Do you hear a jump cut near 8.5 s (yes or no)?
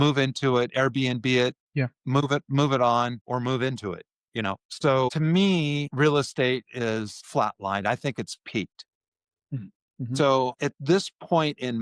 no